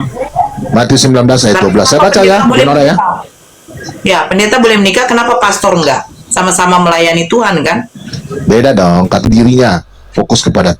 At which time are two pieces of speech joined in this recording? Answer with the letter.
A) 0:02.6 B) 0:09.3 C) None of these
B